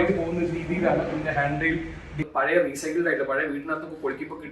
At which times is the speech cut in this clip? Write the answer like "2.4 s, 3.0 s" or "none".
2.1 s